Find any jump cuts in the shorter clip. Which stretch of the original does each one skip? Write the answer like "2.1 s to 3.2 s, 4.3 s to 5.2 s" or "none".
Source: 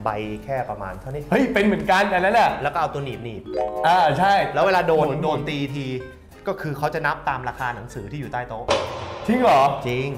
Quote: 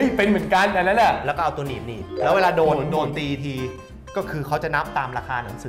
3.6 s to 4.5 s